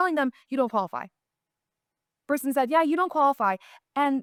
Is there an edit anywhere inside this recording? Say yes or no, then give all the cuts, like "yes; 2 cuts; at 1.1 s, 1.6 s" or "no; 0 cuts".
no; 0 cuts